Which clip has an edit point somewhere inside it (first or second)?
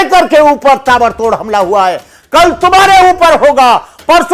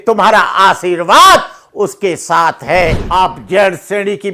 second